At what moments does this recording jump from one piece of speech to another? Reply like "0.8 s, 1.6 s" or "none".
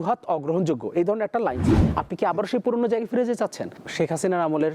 1.8 s